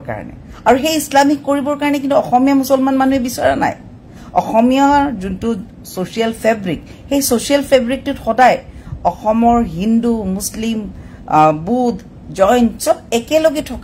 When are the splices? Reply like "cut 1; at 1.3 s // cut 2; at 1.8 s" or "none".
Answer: none